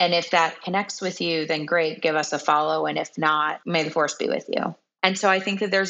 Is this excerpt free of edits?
no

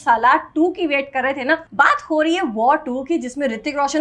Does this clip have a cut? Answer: yes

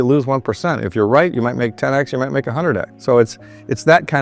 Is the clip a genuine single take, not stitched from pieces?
no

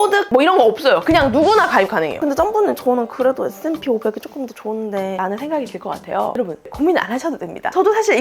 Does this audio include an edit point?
yes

